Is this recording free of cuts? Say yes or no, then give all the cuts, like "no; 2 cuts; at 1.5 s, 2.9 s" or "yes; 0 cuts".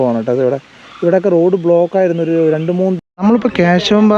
no; 1 cut; at 3.0 s